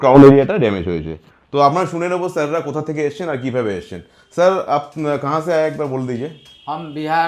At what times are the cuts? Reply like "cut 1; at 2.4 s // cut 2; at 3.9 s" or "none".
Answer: none